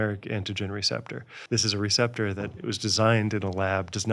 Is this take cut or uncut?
cut